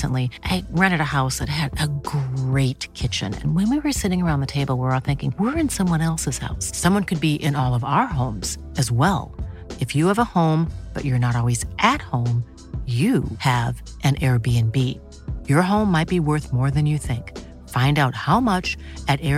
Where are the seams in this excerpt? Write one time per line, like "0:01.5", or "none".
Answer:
none